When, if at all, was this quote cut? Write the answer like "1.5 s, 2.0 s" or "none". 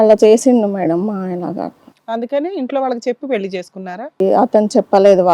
4.2 s